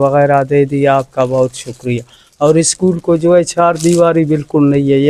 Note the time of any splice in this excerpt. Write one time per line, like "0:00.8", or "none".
none